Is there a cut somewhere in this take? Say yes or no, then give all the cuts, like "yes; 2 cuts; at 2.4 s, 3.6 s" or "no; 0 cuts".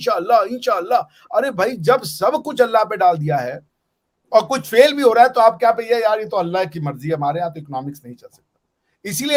no; 0 cuts